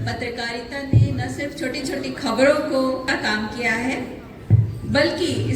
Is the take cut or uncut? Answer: cut